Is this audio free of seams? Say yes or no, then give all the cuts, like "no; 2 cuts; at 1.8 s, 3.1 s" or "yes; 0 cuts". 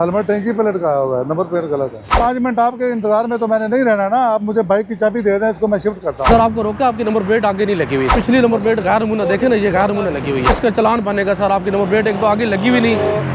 no; 4 cuts; at 2.2 s, 6.3 s, 8.2 s, 10.6 s